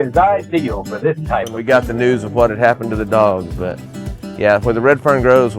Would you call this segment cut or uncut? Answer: cut